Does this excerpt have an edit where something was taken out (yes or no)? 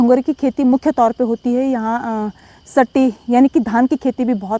no